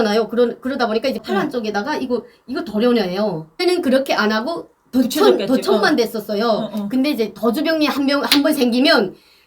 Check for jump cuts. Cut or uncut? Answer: cut